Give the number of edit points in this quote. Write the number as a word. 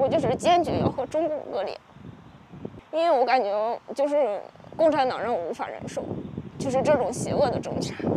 one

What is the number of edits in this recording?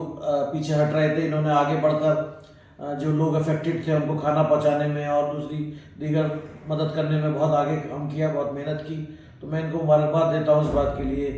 zero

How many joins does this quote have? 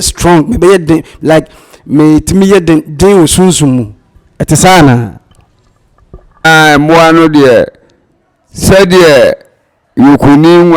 one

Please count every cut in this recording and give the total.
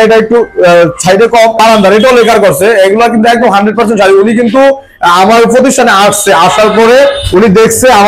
one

